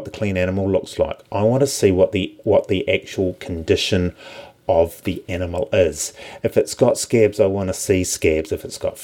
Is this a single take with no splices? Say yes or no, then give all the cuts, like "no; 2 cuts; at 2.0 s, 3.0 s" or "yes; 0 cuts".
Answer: yes; 0 cuts